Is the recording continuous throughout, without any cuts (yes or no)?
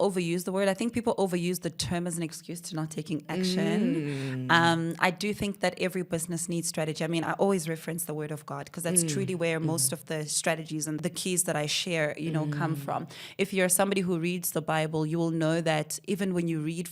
no